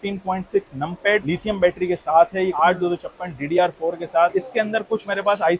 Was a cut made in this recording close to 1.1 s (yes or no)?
no